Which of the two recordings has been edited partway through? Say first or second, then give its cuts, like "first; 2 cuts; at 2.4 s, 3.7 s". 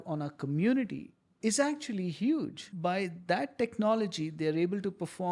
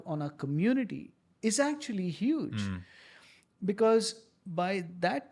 first; 1 cut; at 2.5 s